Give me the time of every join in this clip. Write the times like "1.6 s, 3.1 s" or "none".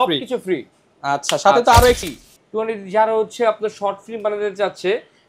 2.0 s